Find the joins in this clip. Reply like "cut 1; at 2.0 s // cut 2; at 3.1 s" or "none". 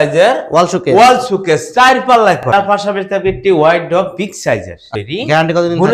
cut 1; at 2.4 s // cut 2; at 4.9 s